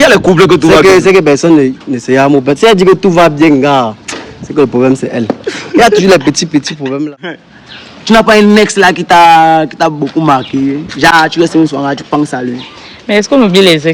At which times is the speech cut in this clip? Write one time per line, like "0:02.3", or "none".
0:07.5